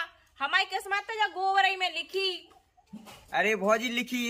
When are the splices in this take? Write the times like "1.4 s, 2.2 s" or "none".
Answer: none